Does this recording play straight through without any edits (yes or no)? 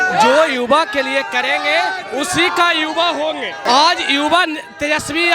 no